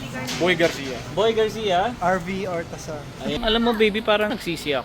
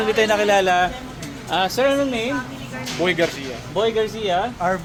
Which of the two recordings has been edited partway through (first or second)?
first